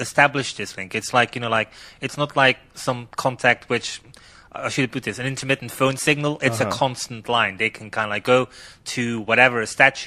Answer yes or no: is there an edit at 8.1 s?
no